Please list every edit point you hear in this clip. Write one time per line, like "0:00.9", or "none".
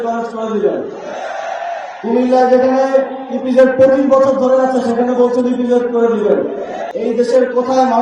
0:06.8